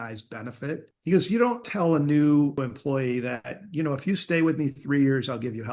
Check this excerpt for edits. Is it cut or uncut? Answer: cut